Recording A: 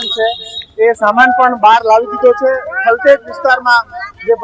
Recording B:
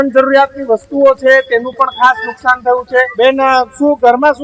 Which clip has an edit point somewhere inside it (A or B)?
B